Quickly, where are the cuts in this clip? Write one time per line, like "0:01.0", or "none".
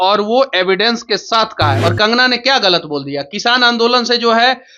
0:01.8

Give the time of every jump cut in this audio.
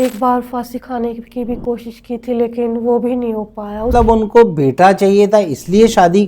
0:03.9

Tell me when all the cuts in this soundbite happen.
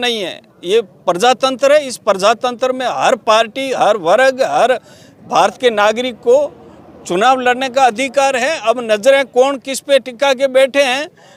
none

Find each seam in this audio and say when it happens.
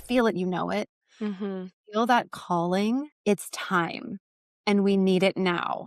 0:03.1

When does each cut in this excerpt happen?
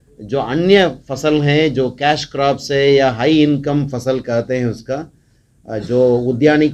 none

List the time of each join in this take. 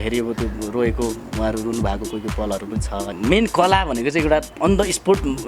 0:03.1

